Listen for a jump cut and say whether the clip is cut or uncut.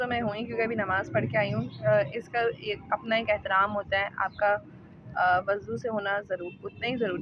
uncut